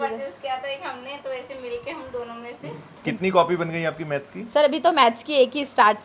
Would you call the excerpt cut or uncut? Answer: cut